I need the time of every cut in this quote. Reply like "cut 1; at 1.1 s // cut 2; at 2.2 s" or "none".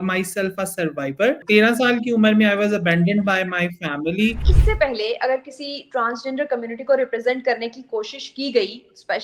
cut 1; at 1.4 s // cut 2; at 4.5 s